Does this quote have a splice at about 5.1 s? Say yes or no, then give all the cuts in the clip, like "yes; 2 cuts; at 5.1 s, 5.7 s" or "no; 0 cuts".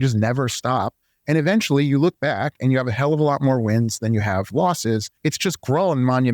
yes; 1 cut; at 5.1 s